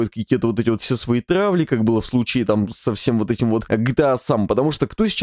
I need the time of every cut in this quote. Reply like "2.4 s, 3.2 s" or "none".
3.7 s